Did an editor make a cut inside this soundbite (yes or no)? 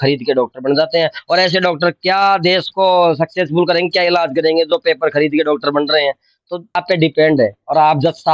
yes